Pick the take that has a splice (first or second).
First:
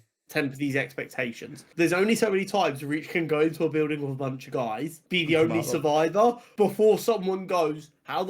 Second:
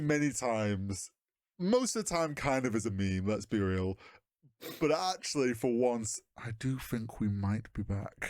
first